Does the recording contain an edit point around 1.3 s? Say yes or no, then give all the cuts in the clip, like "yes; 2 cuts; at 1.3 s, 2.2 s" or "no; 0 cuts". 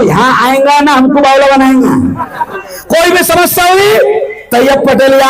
no; 1 cut; at 2.6 s